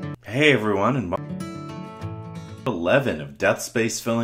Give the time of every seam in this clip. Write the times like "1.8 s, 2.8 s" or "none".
1.2 s, 2.5 s